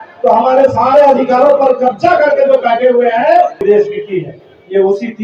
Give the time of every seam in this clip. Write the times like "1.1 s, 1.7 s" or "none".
3.6 s